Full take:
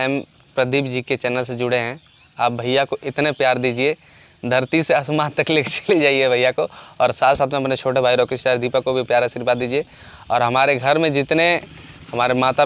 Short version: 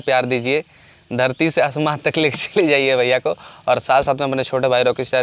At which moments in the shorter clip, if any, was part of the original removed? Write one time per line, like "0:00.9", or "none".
none